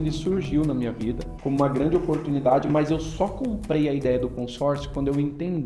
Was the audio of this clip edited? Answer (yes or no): yes